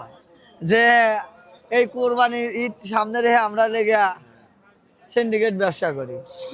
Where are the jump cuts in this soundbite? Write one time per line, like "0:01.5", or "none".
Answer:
none